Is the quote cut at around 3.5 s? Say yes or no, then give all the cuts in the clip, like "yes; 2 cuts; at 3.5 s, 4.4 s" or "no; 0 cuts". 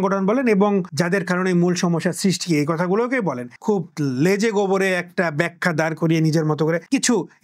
yes; 1 cut; at 3.5 s